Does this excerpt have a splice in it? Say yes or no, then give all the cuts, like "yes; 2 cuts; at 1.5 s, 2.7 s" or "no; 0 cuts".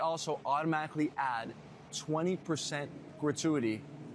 no; 0 cuts